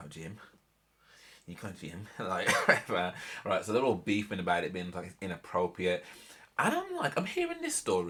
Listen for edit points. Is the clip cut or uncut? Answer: uncut